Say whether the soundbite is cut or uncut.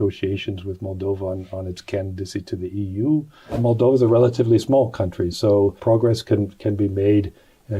cut